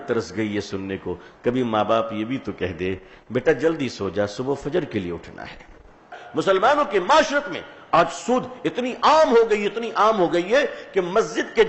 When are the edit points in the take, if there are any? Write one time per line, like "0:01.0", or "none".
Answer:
0:06.2